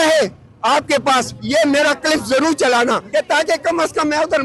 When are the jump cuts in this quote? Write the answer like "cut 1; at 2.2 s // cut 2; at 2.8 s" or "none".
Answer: cut 1; at 3.0 s